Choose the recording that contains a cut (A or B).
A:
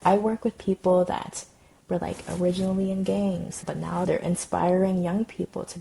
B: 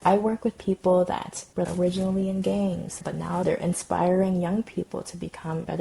B